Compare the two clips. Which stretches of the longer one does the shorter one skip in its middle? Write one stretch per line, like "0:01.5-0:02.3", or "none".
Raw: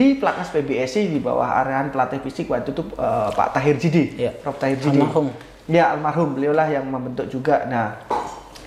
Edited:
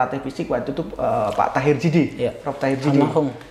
none